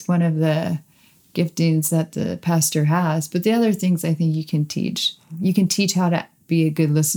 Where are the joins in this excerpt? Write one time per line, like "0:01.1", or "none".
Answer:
0:05.3